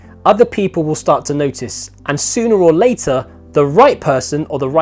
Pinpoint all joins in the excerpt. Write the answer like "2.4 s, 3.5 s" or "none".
none